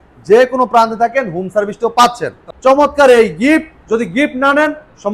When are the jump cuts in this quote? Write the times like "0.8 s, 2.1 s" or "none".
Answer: 2.4 s